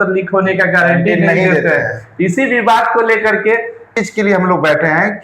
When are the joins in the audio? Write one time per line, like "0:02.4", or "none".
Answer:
0:04.0